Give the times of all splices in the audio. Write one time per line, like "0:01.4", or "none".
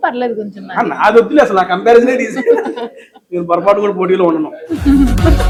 none